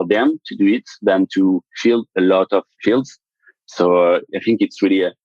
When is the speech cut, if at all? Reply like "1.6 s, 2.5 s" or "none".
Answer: 3.2 s, 4.3 s